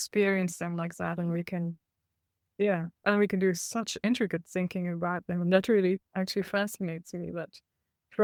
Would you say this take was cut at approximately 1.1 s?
no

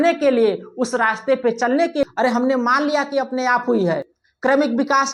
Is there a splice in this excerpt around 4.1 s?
no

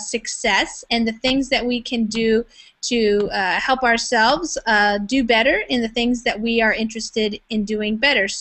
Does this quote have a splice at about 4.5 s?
yes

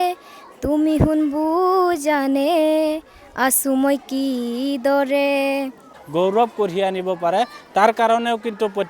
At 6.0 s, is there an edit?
yes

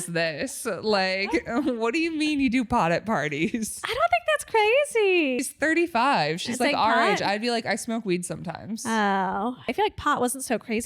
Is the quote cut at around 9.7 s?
yes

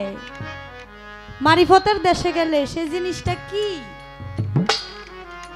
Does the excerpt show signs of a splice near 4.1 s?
no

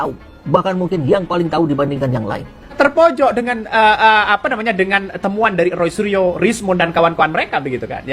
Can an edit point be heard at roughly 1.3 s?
no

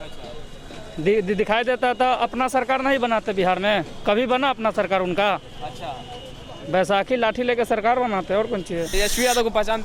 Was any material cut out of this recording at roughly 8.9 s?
yes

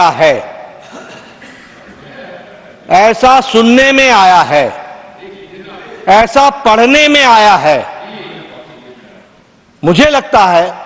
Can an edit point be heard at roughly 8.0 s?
no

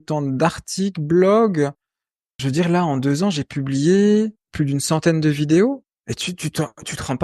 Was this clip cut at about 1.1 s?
no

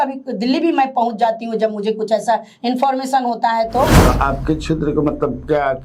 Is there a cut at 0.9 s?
no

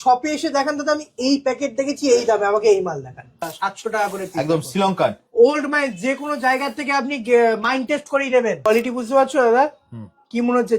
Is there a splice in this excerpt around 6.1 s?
no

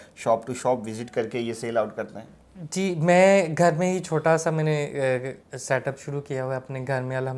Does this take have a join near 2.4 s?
no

